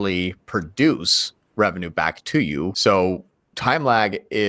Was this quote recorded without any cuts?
no; 1 cut; at 2.8 s

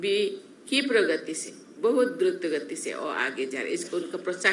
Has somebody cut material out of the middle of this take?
no; 0 cuts

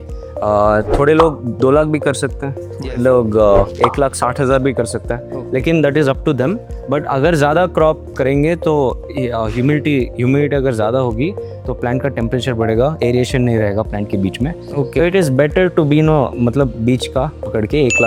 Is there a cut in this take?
no; 0 cuts

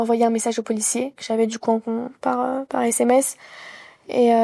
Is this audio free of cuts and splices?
yes; 0 cuts

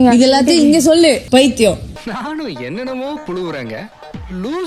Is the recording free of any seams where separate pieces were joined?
no; 1 cut; at 1.2 s

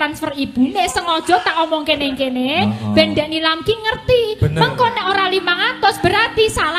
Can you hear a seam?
no; 0 cuts

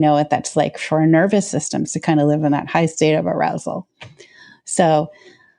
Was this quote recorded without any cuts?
yes; 0 cuts

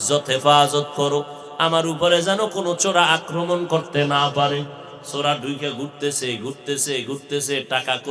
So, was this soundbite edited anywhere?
no; 0 cuts

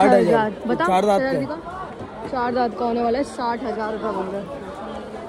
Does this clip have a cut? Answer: no; 0 cuts

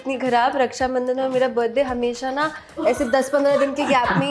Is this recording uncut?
yes; 0 cuts

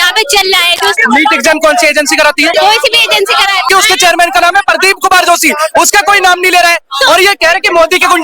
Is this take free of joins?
no; 3 cuts; at 1.0 s, 2.5 s, 3.7 s

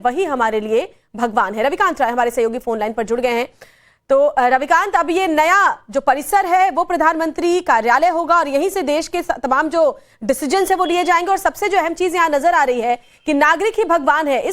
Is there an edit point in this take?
yes; 1 cut; at 1.5 s

